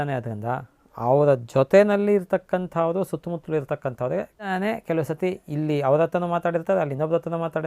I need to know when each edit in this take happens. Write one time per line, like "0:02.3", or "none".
0:04.5